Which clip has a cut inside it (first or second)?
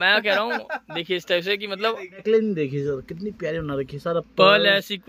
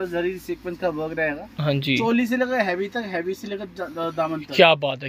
first